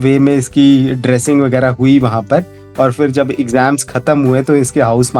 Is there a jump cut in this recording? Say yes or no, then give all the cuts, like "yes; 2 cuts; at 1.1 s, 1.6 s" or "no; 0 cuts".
no; 0 cuts